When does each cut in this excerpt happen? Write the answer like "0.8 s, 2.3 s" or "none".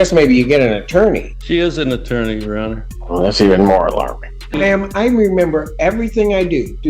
1.3 s, 2.9 s, 4.6 s